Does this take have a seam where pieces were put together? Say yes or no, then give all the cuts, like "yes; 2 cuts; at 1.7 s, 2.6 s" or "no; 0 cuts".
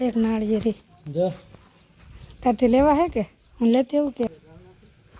yes; 1 cut; at 4.3 s